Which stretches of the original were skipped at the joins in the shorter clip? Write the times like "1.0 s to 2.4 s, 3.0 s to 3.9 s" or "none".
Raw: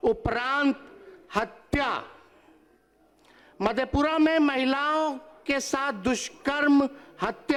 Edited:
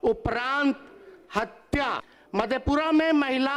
2.1 s to 3.4 s

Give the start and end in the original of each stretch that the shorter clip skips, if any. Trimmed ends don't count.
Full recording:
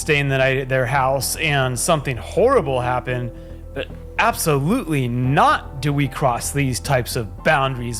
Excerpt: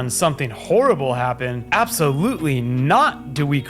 3.2 s to 4.0 s

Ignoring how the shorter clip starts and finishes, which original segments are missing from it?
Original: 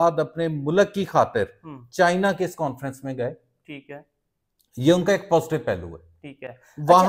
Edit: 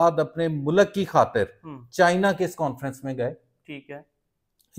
none

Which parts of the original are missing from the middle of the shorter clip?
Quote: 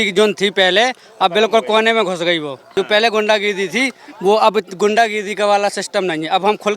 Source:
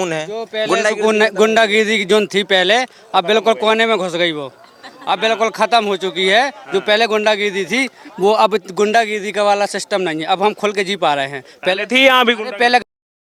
4.6 s to 6.6 s

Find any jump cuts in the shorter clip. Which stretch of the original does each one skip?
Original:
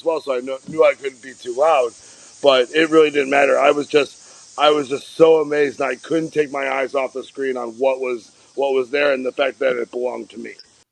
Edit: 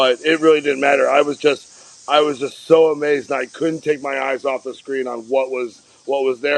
none

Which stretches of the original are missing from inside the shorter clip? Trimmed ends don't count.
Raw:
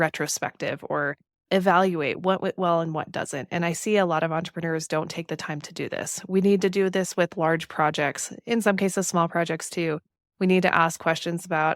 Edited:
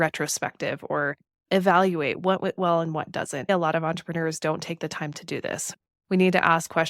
3.5 s to 4.0 s, 6.2 s to 10.0 s

